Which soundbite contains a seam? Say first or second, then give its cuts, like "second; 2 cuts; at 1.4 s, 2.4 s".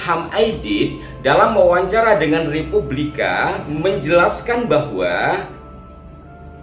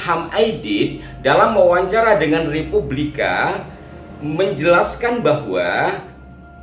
first; 1 cut; at 3.6 s